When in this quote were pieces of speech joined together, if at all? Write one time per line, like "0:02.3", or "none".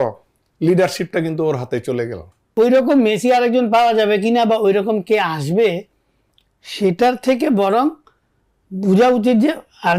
0:02.4